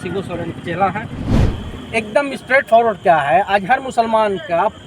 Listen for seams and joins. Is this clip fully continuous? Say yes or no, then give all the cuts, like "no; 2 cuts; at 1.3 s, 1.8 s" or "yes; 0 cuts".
no; 1 cut; at 1.3 s